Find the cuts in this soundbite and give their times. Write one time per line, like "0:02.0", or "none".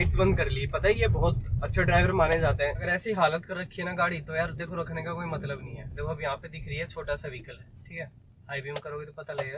0:02.8
0:05.8